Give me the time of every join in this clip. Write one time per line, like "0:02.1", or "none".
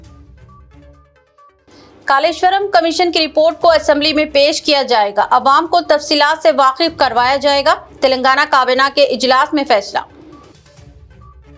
0:01.0